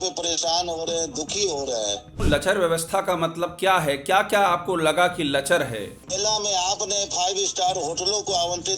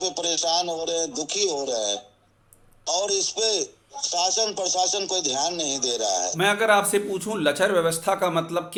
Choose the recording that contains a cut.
first; 2 cuts; at 2.2 s, 6.0 s

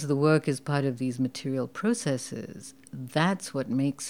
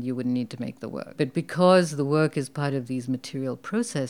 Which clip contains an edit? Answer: second; 1 cut; at 1.0 s

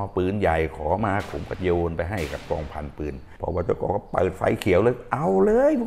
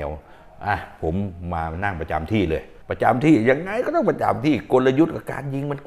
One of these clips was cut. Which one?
first; 2 cuts; at 1.3 s, 3.3 s

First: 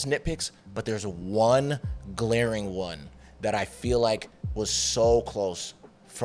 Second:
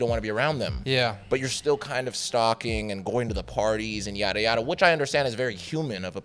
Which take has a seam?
first; 1 cut; at 4.4 s

